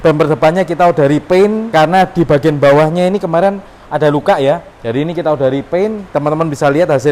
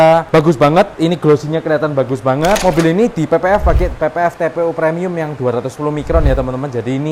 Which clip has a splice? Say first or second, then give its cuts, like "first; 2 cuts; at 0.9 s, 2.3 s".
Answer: second; 1 cut; at 2.6 s